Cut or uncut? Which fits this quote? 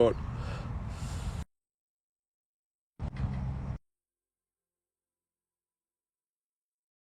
uncut